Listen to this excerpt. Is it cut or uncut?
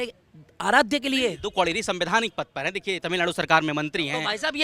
uncut